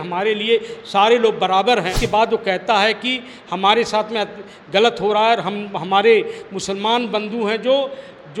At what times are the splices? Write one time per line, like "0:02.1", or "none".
0:02.0